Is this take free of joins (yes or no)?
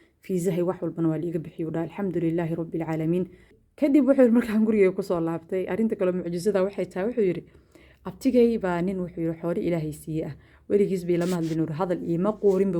no